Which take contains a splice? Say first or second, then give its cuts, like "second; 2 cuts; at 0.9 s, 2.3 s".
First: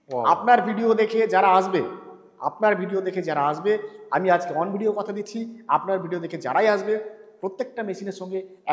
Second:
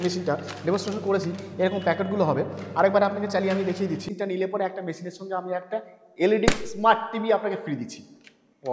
second; 1 cut; at 4.1 s